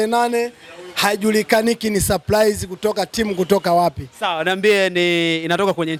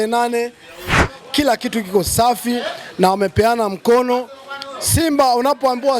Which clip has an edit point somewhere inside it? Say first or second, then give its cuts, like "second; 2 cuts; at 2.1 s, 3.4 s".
second; 1 cut; at 1.0 s